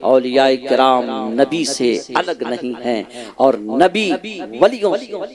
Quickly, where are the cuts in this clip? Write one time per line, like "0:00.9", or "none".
none